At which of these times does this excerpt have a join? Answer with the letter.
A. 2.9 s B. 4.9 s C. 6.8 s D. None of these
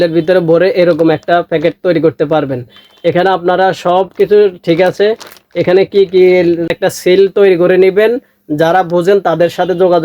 C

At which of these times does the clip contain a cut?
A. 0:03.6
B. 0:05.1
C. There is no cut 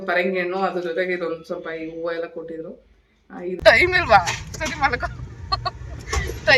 A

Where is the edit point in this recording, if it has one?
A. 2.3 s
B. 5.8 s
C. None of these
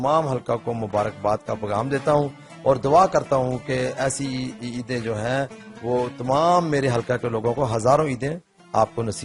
C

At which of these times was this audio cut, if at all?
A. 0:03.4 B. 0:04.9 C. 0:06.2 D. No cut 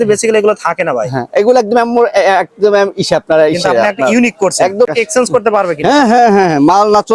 B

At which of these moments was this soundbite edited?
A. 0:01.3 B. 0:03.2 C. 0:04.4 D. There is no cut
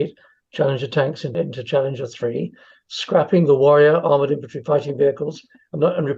A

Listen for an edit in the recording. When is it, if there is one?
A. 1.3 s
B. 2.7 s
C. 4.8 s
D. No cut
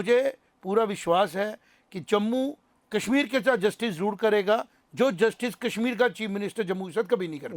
B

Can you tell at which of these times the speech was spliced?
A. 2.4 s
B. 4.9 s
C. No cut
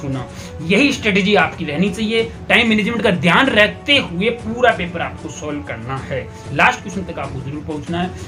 C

